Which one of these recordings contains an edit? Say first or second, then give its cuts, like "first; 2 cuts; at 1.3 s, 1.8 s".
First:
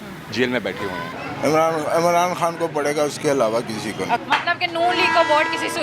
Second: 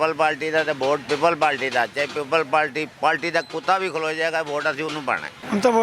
first; 2 cuts; at 1.1 s, 4.2 s